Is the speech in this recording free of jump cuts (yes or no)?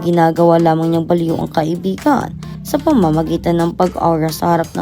yes